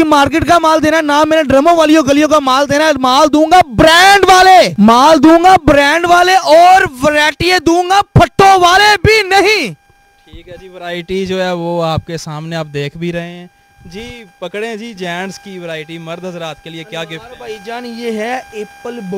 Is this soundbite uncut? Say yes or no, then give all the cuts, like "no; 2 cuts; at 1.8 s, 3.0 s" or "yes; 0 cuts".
yes; 0 cuts